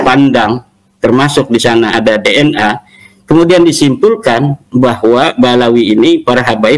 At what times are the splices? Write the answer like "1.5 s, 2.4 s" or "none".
none